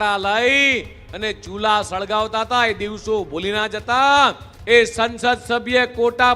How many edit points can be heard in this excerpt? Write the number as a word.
one